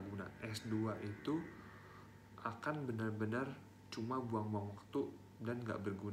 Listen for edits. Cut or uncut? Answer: uncut